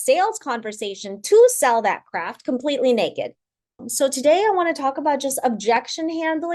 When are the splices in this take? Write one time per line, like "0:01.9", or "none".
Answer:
0:03.8